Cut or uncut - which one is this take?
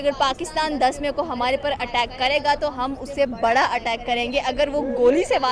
uncut